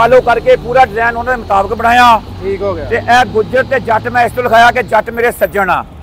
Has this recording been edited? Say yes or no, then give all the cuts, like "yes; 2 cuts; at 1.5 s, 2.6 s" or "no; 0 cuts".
no; 0 cuts